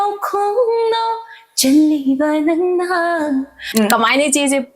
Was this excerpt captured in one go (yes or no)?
no